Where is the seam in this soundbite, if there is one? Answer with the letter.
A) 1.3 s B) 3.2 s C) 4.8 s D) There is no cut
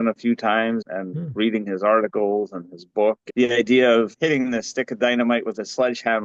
B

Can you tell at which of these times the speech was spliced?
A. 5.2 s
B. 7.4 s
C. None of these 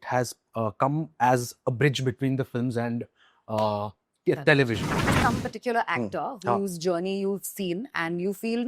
A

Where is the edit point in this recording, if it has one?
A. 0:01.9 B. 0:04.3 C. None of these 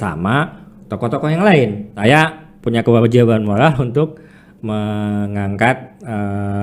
A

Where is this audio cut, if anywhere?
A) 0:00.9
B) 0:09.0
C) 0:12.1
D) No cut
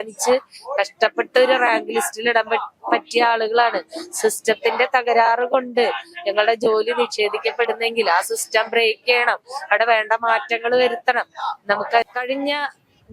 C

